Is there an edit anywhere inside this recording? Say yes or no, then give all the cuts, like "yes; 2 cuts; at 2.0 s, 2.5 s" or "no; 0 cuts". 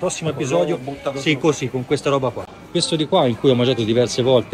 yes; 1 cut; at 2.5 s